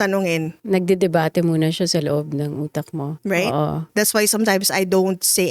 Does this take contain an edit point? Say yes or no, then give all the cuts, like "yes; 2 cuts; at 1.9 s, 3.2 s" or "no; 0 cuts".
yes; 1 cut; at 3.9 s